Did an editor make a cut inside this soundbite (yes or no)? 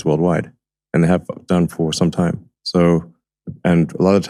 no